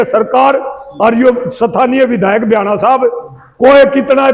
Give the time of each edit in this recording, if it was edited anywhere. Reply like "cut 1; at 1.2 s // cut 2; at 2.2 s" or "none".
none